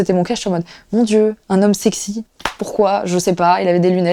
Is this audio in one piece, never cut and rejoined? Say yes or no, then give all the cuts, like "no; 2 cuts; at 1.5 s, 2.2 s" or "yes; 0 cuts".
yes; 0 cuts